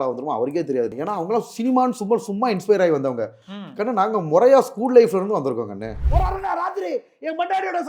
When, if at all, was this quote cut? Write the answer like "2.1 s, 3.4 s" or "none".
0.9 s, 6.0 s